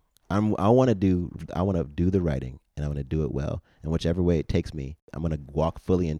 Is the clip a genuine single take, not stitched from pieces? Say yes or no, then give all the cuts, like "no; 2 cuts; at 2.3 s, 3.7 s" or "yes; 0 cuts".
no; 1 cut; at 5.1 s